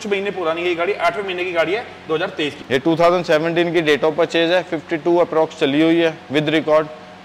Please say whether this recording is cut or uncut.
cut